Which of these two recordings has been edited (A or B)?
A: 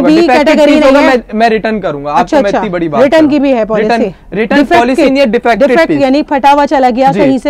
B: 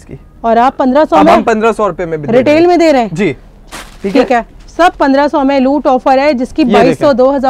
B